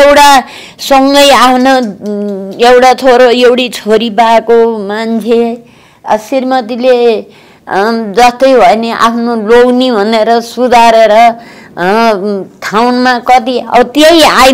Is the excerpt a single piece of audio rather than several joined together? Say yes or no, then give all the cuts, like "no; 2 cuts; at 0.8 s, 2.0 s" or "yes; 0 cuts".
yes; 0 cuts